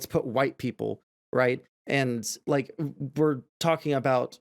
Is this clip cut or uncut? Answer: uncut